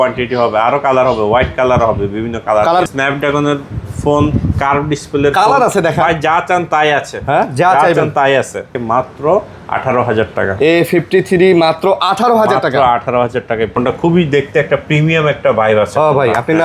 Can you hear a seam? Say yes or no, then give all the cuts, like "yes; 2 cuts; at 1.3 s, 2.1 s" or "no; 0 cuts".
yes; 3 cuts; at 2.9 s, 8.7 s, 13.7 s